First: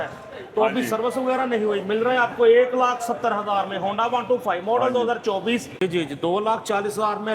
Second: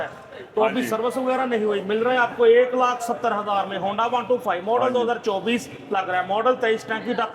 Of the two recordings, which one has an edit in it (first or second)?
first